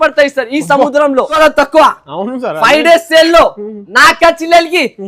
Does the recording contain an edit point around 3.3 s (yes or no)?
no